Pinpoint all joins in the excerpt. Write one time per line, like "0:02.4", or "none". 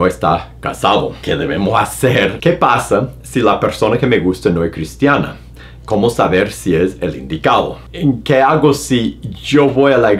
0:01.2
0:02.4
0:07.8